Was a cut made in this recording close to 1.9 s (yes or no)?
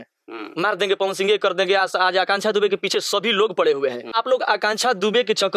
no